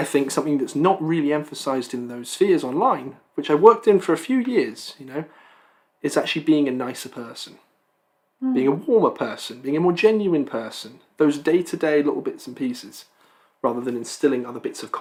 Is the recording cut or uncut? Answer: uncut